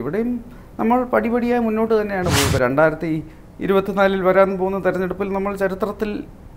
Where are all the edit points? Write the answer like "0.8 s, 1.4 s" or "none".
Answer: 2.5 s